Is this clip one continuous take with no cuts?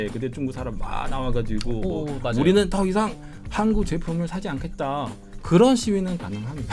yes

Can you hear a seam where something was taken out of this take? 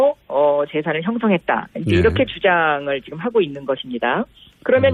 yes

